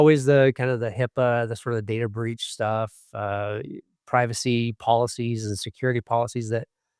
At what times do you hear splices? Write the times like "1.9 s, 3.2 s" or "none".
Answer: none